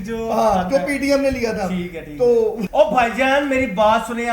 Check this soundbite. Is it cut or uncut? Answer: cut